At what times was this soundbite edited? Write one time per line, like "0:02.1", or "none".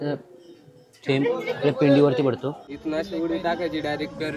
0:02.7